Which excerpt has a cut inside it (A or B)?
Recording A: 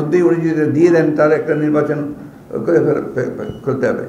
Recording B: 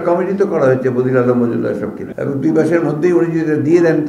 B